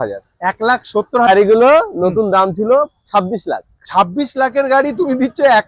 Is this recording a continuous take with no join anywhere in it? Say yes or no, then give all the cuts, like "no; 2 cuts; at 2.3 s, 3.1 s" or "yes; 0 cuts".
no; 1 cut; at 1.3 s